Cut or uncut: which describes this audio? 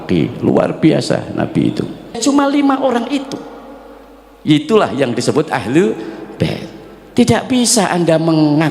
cut